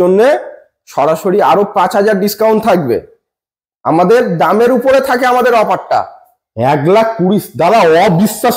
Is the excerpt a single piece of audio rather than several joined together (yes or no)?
yes